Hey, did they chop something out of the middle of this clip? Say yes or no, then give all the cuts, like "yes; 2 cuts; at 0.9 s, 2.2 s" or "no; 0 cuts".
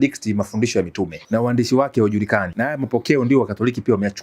yes; 2 cuts; at 1.2 s, 2.5 s